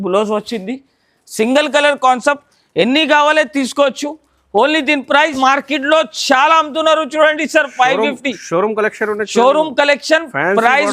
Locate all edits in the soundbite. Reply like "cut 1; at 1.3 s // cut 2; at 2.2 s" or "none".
cut 1; at 5.3 s